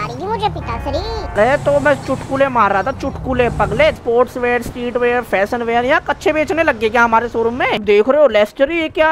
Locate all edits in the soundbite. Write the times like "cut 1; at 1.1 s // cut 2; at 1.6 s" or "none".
cut 1; at 1.4 s // cut 2; at 4.0 s // cut 3; at 7.8 s